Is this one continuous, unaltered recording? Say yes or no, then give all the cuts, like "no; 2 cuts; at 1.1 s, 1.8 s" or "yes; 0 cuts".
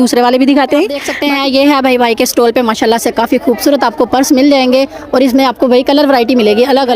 no; 1 cut; at 1.1 s